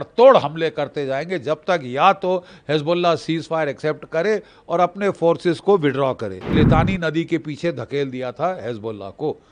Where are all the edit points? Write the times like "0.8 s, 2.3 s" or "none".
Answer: 6.5 s